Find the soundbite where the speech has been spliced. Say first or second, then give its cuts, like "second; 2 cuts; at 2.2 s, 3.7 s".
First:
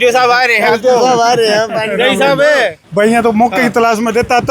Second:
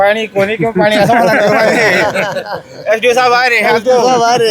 first; 1 cut; at 2.8 s